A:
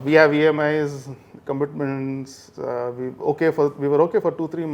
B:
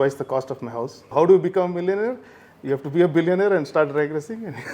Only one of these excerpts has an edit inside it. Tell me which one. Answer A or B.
B